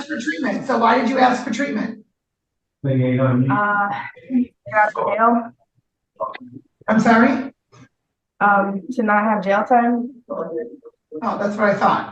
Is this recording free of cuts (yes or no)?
yes